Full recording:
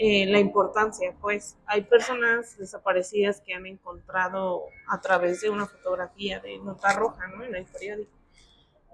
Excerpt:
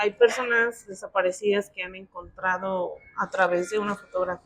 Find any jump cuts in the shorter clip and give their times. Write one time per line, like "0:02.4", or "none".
none